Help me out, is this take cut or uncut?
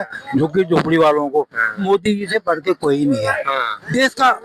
cut